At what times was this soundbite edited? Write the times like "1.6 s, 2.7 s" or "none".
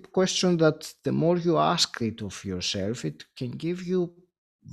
none